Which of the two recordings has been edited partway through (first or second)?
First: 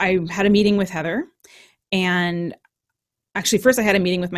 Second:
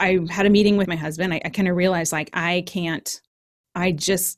second